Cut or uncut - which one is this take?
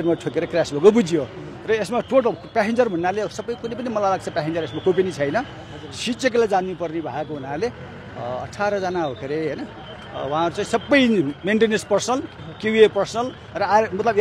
uncut